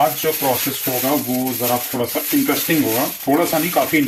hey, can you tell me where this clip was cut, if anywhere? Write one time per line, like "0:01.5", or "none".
none